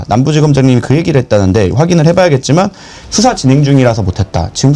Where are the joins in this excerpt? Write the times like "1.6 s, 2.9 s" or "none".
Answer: none